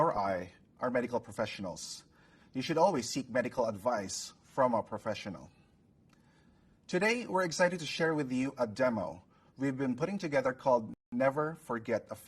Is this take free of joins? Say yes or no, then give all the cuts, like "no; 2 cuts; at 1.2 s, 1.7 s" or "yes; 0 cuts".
yes; 0 cuts